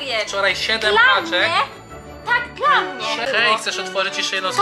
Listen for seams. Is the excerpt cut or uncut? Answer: cut